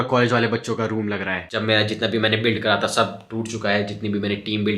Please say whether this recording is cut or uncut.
cut